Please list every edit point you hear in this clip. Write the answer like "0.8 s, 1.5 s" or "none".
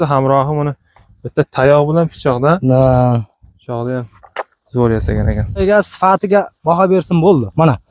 5.6 s